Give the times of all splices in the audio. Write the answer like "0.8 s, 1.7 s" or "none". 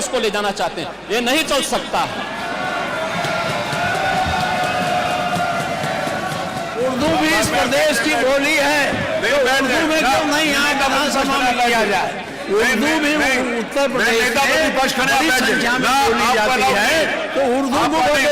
none